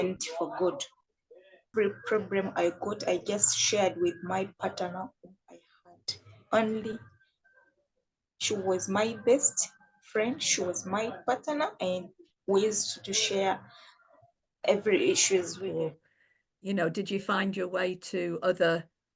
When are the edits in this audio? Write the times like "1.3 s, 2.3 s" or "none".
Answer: 1.6 s, 15.6 s